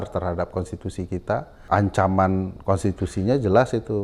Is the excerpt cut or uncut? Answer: cut